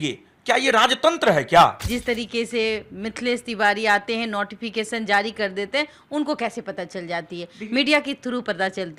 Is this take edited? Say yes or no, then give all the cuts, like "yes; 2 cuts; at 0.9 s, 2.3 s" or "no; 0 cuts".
yes; 1 cut; at 1.8 s